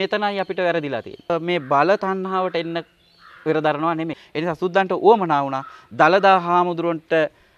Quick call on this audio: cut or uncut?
cut